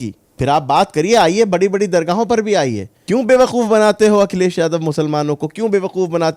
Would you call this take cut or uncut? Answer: cut